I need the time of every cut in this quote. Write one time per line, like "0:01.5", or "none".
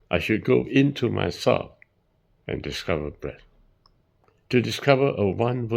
0:04.5